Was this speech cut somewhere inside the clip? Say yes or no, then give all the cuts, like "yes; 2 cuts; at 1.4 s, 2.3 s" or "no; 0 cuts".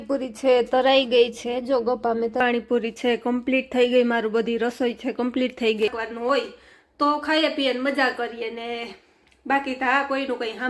yes; 2 cuts; at 2.4 s, 5.9 s